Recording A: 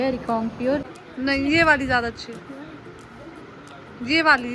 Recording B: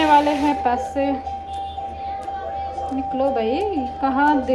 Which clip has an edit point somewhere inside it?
A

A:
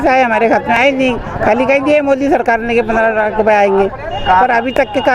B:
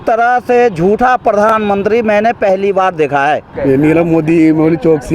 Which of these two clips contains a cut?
B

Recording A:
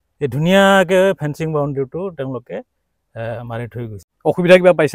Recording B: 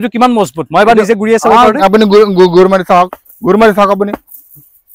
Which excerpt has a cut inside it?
A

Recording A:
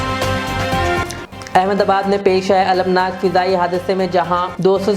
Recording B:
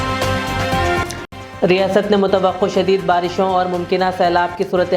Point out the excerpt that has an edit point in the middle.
A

